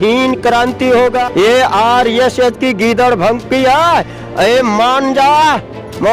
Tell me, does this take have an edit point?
yes; 1 cut; at 1.2 s

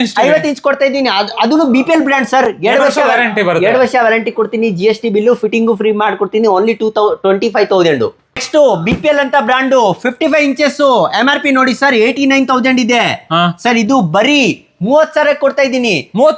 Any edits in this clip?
no; 0 cuts

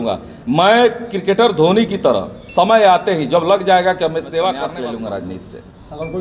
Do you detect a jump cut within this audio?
yes; 1 cut; at 4.7 s

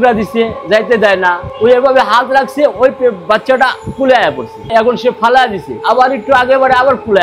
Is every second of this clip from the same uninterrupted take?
no; 1 cut; at 1.5 s

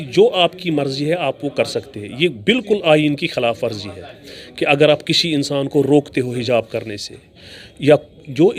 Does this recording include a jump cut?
no; 0 cuts

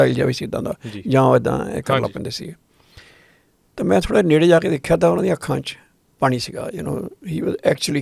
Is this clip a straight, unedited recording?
yes; 0 cuts

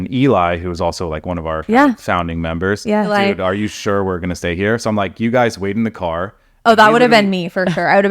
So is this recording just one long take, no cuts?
no; 1 cut; at 3.1 s

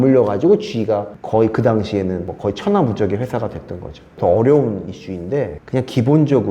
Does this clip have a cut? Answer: yes; 1 cut; at 4.1 s

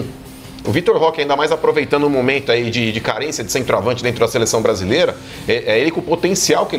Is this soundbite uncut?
yes; 0 cuts

